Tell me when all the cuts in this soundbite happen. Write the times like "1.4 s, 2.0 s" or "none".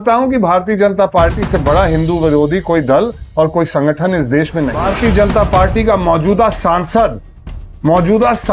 4.8 s